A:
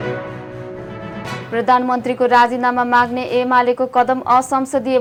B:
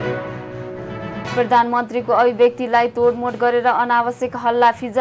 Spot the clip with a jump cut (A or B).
B